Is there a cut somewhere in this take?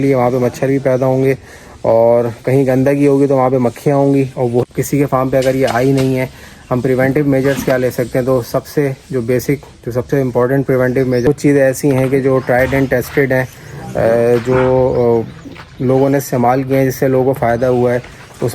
yes; 2 cuts; at 4.6 s, 11.2 s

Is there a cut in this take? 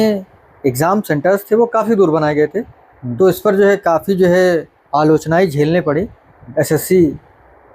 no; 0 cuts

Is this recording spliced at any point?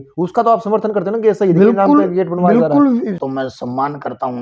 yes; 1 cut; at 3.2 s

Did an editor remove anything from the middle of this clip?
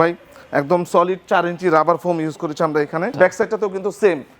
yes; 1 cut; at 3.2 s

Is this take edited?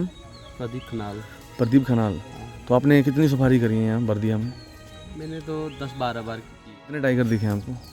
yes; 1 cut; at 6.9 s

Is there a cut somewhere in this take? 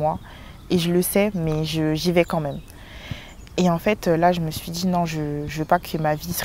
no; 0 cuts

